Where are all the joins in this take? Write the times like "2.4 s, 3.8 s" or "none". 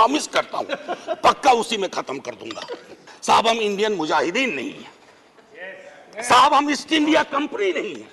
3.1 s